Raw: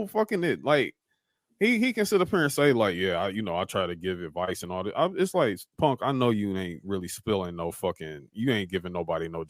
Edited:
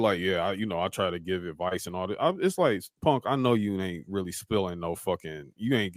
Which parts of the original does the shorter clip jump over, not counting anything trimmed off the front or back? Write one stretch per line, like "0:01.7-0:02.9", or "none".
none